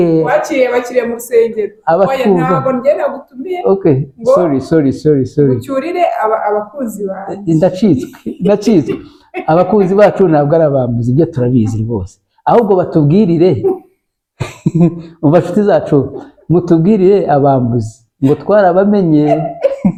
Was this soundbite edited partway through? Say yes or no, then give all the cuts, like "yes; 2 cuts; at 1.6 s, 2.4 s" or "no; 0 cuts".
no; 0 cuts